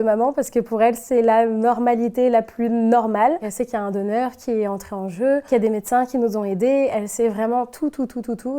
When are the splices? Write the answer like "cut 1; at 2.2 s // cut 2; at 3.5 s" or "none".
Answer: none

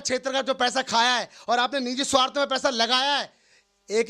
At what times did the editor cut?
none

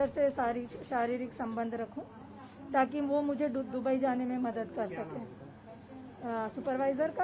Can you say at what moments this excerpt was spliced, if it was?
none

